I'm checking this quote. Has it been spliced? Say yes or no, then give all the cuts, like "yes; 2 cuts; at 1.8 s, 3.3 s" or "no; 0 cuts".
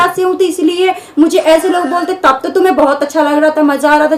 no; 0 cuts